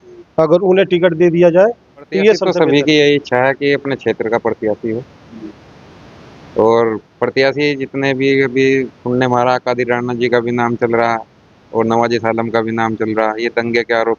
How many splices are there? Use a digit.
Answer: 1